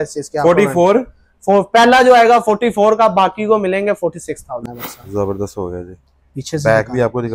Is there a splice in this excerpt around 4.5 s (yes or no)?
yes